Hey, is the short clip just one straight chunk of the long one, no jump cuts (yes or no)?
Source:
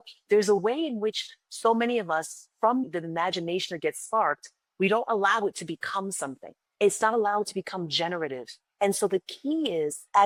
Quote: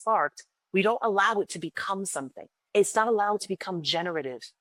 yes